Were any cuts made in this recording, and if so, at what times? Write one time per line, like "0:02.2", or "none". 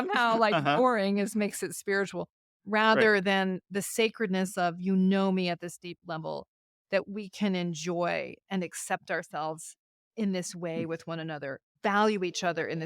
0:11.7

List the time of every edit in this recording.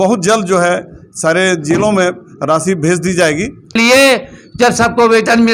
0:03.8

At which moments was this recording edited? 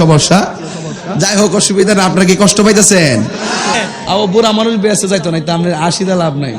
0:03.7

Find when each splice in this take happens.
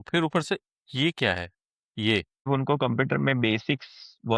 0:02.5

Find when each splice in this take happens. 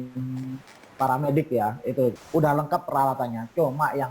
0:02.2

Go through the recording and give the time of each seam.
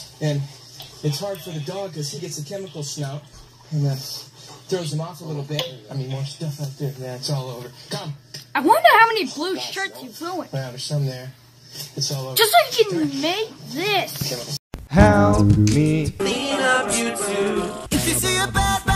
0:14.5
0:16.1
0:17.8

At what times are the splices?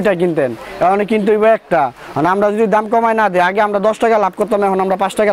none

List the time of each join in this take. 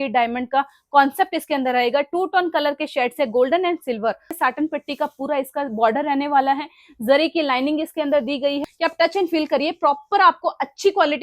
0:04.4
0:08.6

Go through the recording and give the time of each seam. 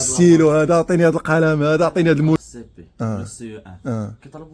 0:02.4

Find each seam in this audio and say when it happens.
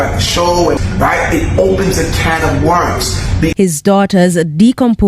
0:00.8
0:03.5

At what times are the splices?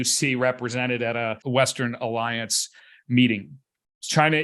0:01.4

